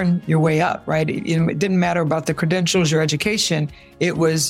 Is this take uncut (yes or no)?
yes